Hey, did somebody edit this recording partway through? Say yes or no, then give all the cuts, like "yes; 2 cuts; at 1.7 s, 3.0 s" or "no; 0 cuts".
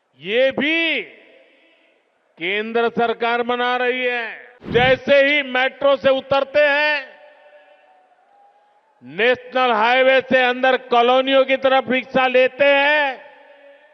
yes; 1 cut; at 4.6 s